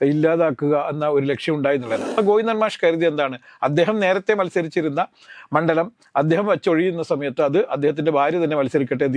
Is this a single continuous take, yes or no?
no